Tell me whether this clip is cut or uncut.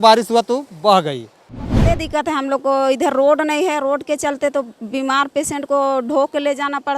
cut